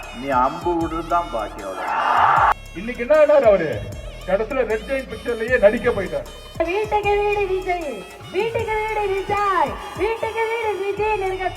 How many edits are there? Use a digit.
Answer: 2